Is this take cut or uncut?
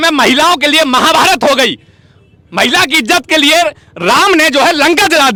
uncut